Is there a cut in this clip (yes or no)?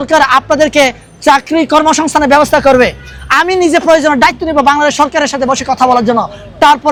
no